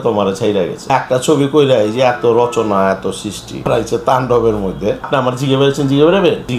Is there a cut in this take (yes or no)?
yes